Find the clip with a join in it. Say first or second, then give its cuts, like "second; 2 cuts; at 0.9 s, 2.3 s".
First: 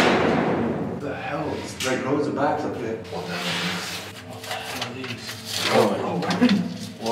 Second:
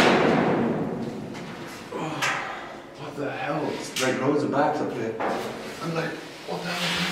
first; 3 cuts; at 1.0 s, 3.0 s, 4.1 s